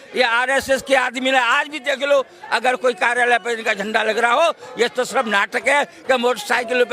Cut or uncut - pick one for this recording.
uncut